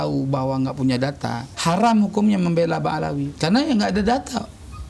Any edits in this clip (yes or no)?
yes